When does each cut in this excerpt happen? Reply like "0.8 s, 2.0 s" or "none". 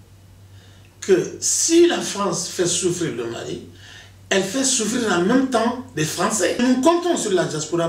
6.6 s